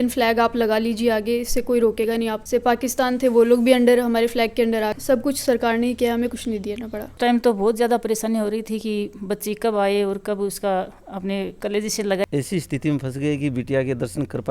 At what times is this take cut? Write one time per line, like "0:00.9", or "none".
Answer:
0:02.4
0:04.9
0:07.1
0:12.2